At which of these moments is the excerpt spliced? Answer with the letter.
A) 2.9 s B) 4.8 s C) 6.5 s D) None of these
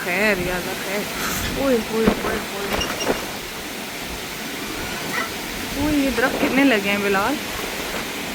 D